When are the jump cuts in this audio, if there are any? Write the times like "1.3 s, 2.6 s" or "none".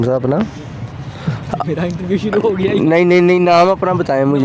none